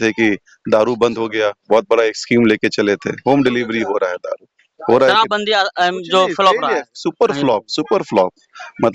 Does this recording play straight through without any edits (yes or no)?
yes